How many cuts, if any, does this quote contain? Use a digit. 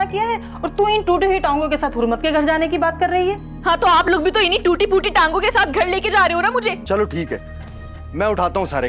1